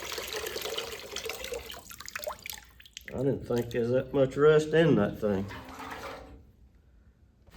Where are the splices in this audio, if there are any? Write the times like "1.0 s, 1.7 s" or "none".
none